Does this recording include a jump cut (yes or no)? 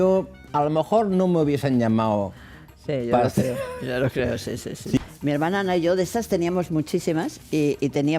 yes